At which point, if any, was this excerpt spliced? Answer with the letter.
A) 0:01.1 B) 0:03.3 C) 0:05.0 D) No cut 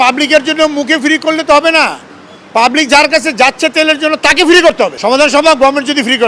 C